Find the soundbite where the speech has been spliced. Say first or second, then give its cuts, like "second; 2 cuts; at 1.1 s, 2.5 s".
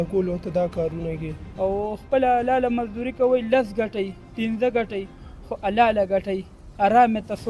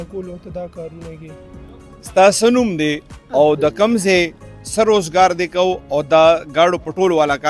first; 1 cut; at 1.4 s